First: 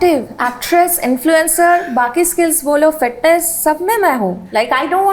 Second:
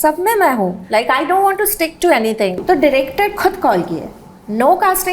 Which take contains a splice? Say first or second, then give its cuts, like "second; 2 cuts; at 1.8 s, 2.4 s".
second; 1 cut; at 2.6 s